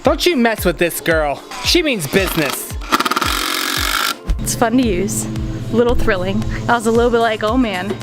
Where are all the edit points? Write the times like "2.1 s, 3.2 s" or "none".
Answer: 1.5 s, 4.4 s

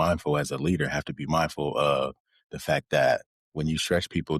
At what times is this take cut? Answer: 3.4 s

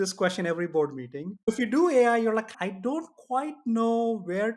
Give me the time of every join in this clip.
1.4 s

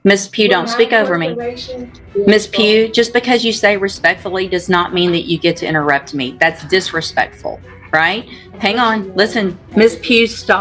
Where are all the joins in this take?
2.0 s, 9.6 s

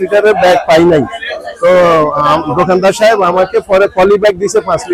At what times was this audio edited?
none

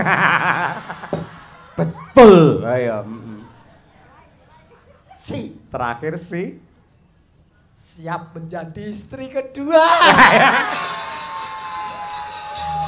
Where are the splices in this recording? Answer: none

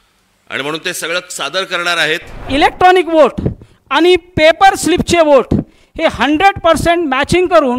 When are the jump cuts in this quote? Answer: 2.5 s

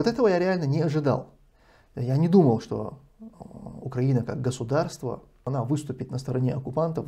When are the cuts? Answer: 5.5 s

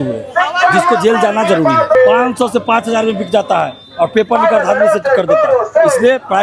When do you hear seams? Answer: 1.9 s

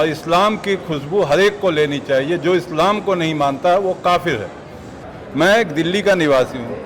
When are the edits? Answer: 4.9 s

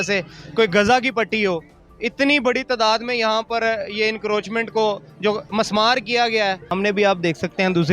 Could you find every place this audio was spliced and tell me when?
6.7 s

